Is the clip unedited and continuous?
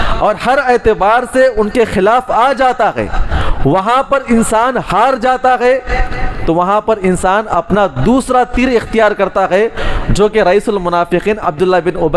yes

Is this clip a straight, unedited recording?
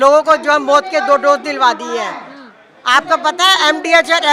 yes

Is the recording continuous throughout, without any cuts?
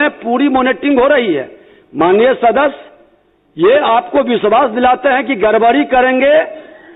yes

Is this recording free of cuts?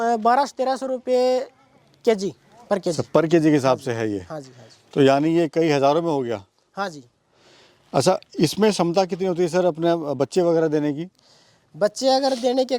yes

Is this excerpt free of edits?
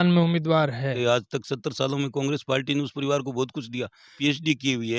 no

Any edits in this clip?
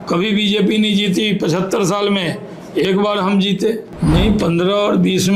yes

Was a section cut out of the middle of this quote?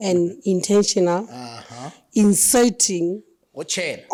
no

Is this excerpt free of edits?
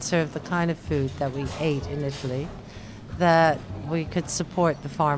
no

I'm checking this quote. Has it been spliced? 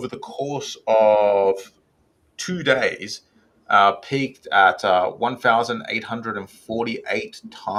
no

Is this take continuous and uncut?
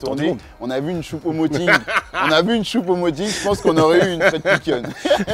yes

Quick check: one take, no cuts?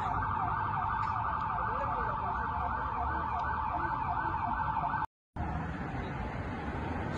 no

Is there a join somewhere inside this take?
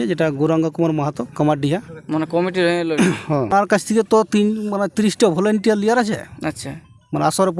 yes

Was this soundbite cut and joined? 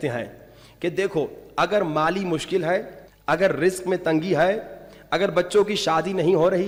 no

